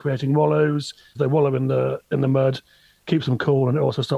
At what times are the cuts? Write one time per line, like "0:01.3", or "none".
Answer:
0:01.0
0:03.1